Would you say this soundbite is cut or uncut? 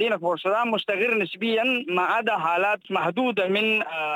cut